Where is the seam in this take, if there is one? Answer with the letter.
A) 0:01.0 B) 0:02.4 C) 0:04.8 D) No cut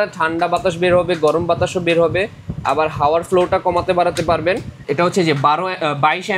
C